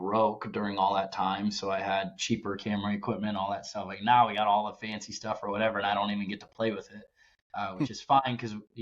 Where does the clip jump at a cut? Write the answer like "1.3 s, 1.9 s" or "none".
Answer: none